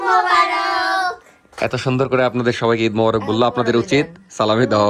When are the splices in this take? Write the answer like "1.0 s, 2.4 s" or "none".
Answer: none